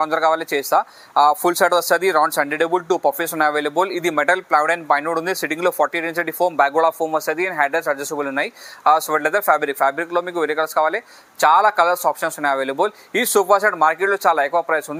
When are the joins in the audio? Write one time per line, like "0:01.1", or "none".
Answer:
none

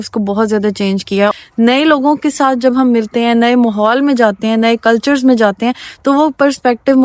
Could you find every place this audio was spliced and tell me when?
0:01.3

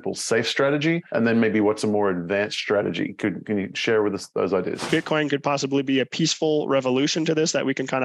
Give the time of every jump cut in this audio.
0:04.9

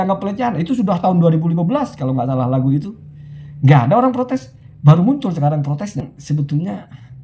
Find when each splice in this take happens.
0:06.0

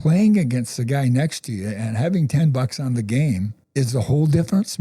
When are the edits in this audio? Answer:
0:03.6

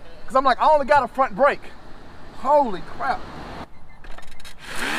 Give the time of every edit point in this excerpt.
0:03.7

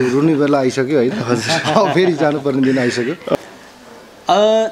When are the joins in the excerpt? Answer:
0:03.4

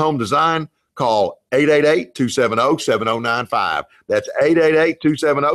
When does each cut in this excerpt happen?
none

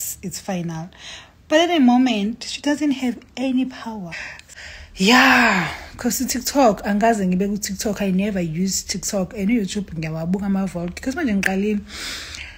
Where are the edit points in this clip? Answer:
0:04.4

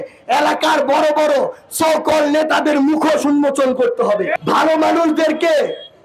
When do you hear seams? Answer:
0:04.3

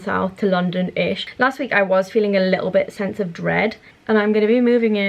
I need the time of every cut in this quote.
0:01.3
0:03.9

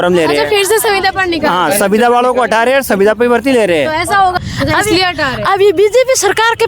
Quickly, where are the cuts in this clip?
0:04.4

